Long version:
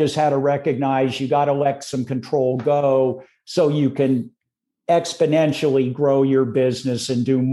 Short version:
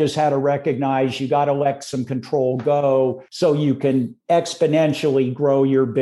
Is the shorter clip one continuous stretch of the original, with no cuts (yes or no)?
no